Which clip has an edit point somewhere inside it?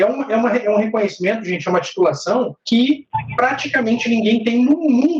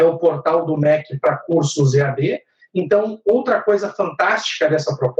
first; 2 cuts; at 2.6 s, 3.2 s

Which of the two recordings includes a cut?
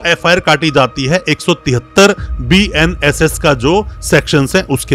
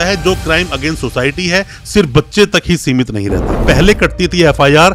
second; 1 cut; at 3.6 s

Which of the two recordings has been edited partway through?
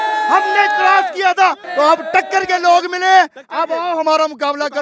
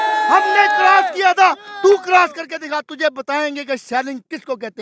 first; 1 cut; at 1.6 s

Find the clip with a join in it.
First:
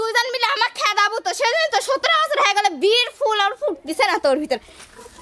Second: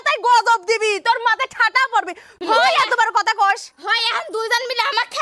second; 1 cut; at 2.3 s

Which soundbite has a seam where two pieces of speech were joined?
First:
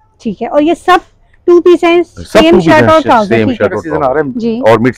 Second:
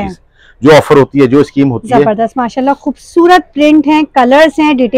first; 1 cut; at 3.8 s

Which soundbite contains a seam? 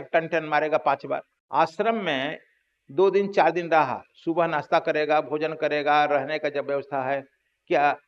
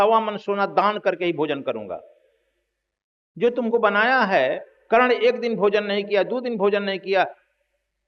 first; 1 cut; at 1.3 s

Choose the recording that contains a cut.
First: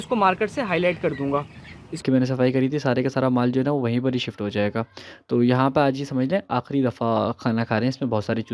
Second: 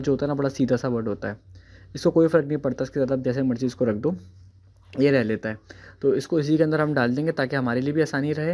first; 1 cut; at 2.0 s

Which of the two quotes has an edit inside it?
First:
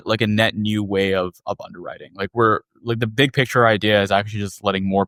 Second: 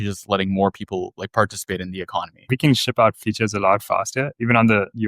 second; 1 cut; at 2.5 s

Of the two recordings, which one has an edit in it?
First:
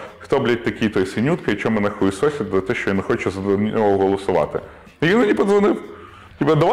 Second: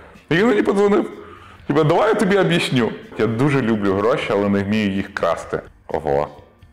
second; 2 cuts; at 3.1 s, 5.7 s

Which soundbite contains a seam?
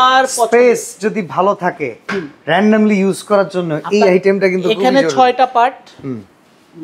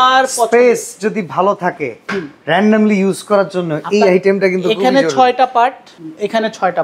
second; 1 cut; at 5.9 s

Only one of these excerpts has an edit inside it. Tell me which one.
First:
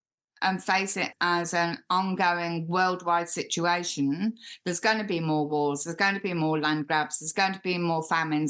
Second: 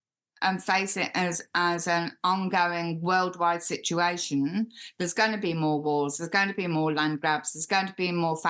first; 1 cut; at 1.1 s

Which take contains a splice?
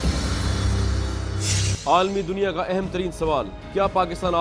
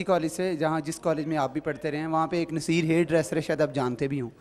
first; 1 cut; at 1.3 s

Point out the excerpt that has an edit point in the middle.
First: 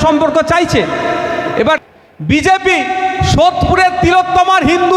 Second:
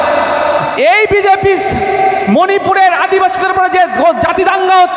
first; 1 cut; at 1.8 s

